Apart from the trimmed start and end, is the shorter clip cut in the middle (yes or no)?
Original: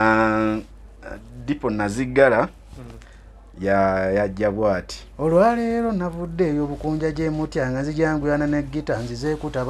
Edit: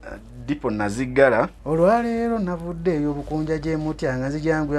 yes